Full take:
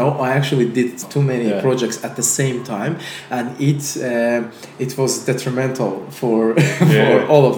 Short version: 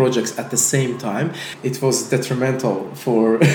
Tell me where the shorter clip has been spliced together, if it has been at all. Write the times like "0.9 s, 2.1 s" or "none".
1.5 s